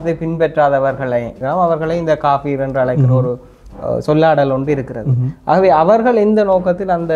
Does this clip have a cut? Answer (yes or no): yes